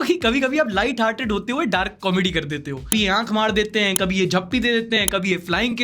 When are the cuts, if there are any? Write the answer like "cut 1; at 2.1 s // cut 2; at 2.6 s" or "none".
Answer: cut 1; at 2.9 s